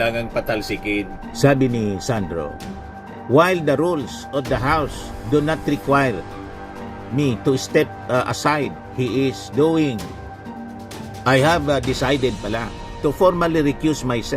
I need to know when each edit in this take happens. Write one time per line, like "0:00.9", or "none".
0:01.2

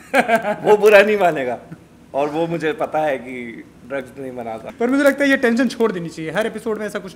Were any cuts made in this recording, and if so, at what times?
0:04.7

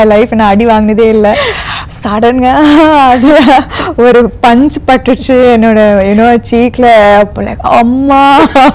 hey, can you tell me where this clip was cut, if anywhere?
none

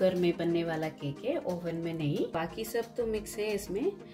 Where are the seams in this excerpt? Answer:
0:02.3

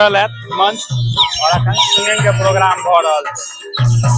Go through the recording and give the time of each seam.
none

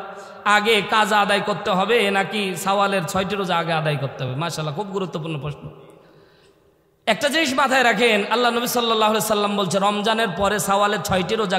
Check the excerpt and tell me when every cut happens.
none

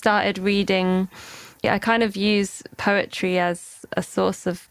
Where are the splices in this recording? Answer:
0:01.6
0:03.8

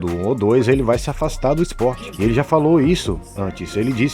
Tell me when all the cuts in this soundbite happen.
0:02.1

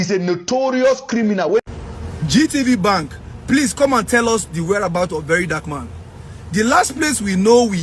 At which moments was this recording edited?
0:01.7

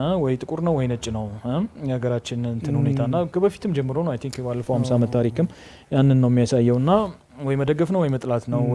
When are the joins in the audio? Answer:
none

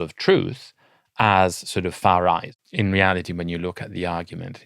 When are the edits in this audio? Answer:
0:02.5

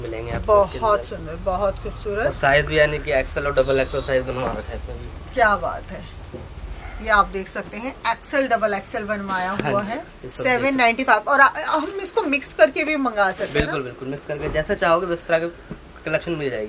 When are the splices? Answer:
0:10.2

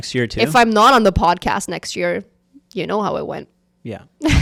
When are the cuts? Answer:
none

